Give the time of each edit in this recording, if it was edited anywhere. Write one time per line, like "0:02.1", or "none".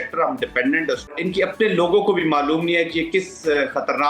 0:01.2